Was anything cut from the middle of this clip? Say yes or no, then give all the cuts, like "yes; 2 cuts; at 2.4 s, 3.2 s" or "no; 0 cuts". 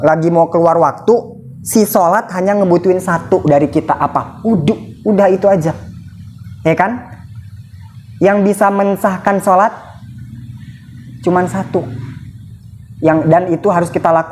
no; 0 cuts